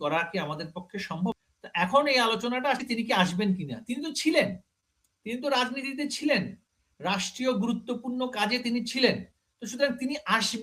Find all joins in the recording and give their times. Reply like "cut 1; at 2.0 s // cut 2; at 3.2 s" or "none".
cut 1; at 1.3 s